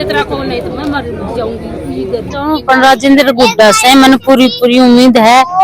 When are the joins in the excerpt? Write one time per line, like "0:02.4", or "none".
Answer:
0:02.6